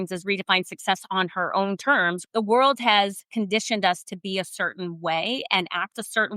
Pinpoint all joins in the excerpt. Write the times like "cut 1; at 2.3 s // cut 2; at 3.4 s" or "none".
cut 1; at 2.2 s